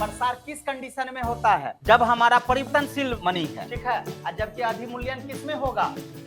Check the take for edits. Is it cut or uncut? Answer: cut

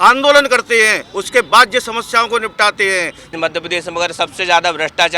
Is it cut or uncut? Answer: cut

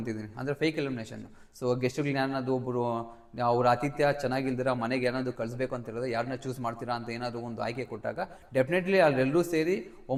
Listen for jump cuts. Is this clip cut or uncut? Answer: uncut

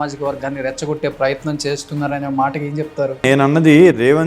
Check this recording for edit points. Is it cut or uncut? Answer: cut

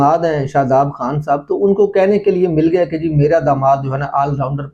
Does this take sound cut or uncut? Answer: uncut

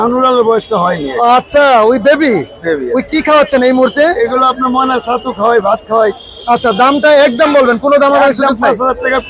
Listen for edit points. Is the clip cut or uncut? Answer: uncut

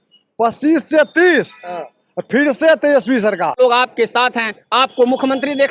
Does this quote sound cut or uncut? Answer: cut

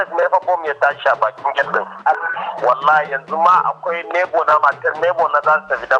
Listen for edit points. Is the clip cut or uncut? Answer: cut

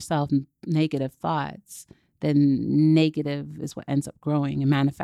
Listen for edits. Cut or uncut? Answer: uncut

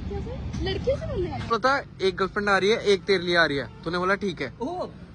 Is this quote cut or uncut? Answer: cut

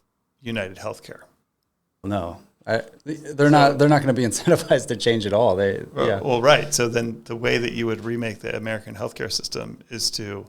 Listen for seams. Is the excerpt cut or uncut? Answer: cut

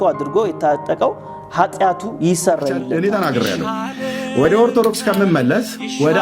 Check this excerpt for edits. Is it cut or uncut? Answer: cut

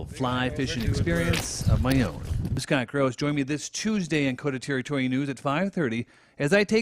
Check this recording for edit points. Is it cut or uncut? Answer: cut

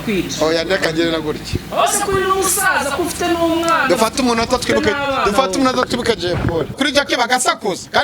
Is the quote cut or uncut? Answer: cut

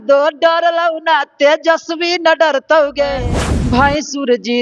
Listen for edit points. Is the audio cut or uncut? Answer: cut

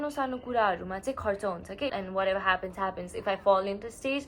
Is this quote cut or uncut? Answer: cut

